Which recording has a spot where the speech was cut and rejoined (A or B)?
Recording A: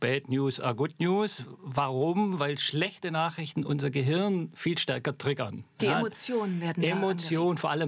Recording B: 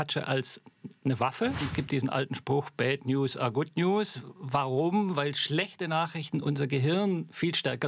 B